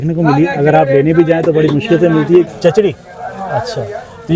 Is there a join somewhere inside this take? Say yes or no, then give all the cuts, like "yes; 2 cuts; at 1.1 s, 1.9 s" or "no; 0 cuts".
yes; 1 cut; at 2.5 s